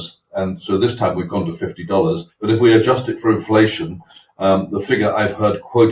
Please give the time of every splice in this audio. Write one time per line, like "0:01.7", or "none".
0:02.3